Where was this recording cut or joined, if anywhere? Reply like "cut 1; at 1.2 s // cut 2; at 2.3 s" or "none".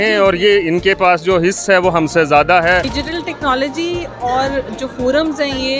cut 1; at 2.9 s